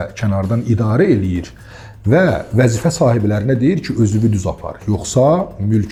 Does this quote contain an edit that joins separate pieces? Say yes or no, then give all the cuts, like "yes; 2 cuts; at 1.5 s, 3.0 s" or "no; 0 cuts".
no; 0 cuts